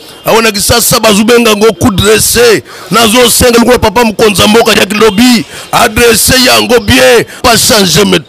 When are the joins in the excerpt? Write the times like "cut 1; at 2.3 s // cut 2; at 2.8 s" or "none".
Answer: cut 1; at 7.4 s